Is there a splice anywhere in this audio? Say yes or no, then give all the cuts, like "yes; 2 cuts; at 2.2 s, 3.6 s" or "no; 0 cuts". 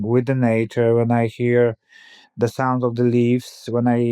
no; 0 cuts